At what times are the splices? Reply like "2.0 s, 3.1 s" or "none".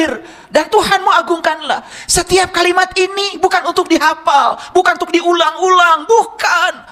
none